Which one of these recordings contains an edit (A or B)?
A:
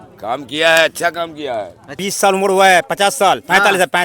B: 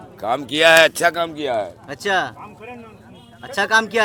A